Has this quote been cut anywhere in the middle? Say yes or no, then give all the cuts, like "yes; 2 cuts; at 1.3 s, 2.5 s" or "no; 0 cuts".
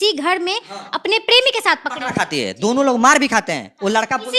no; 0 cuts